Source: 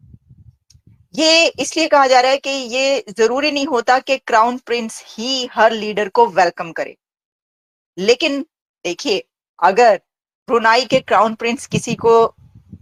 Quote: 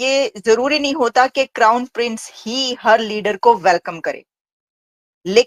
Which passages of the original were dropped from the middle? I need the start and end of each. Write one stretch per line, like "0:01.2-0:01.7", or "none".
none